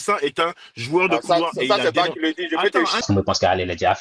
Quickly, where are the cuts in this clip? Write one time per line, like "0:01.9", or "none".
0:03.0